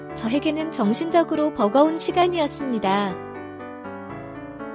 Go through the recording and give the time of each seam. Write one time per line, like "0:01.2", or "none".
0:03.1